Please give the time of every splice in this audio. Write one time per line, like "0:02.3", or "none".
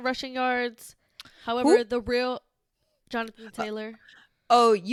none